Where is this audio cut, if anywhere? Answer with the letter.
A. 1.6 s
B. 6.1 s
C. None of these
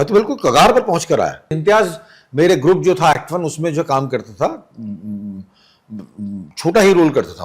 A